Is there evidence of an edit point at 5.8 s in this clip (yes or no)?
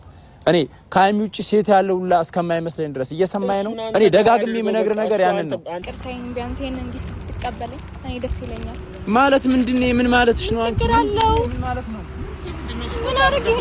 yes